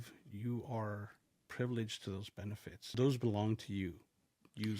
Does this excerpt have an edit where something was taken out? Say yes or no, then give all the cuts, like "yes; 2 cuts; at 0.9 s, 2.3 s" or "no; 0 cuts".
yes; 2 cuts; at 1.4 s, 2.9 s